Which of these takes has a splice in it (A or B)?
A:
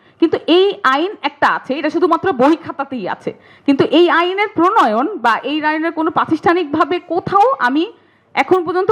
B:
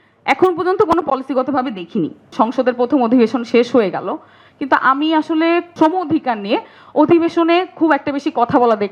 B